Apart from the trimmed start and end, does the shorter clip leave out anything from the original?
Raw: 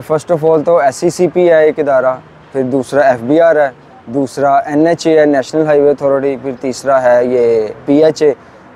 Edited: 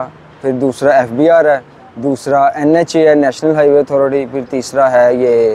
no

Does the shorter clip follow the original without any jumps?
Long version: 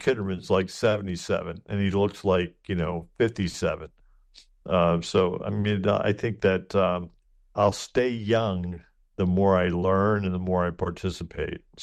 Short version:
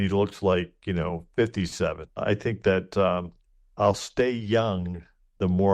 no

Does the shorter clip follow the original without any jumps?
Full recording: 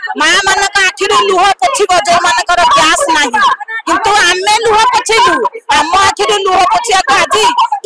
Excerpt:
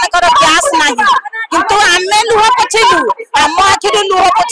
yes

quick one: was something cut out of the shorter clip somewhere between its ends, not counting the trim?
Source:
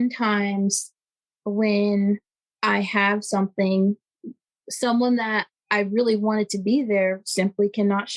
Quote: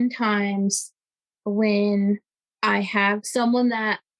yes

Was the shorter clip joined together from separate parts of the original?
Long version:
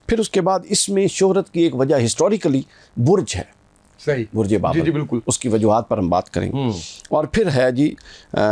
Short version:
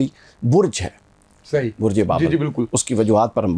no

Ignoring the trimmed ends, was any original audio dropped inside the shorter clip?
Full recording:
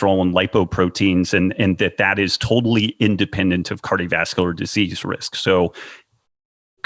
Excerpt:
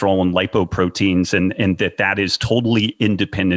no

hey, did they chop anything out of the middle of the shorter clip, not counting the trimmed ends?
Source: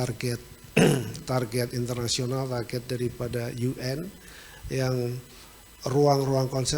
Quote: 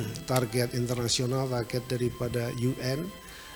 no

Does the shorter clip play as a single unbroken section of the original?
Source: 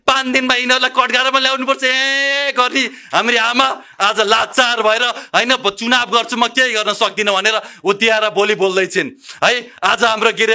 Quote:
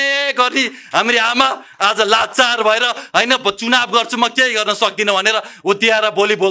yes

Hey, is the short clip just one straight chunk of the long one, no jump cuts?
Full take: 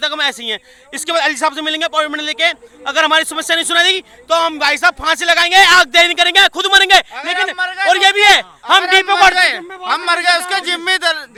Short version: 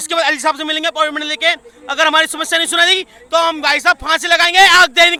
yes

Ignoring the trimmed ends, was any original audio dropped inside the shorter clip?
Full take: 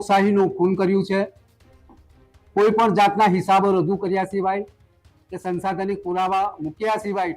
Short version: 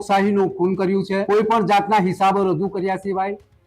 yes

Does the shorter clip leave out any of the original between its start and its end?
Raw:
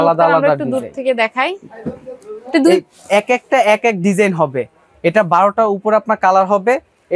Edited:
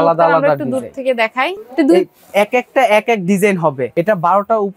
yes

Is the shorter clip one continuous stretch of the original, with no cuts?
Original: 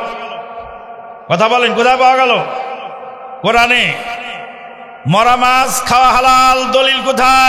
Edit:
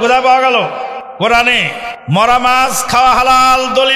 no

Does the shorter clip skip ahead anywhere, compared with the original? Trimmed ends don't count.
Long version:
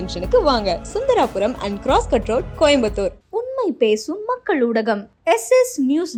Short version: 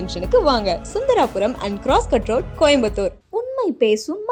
no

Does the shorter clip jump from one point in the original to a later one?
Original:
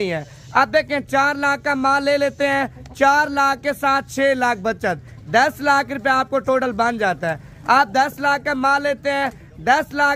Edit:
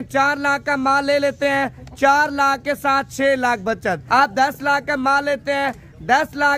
yes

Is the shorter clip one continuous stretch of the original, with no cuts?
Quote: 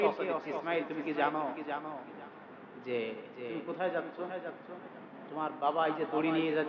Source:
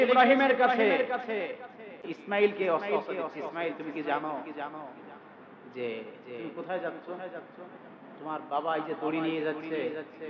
yes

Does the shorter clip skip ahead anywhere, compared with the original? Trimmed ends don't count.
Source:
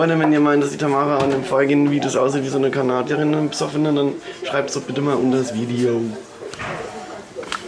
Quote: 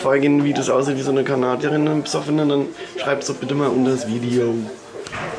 no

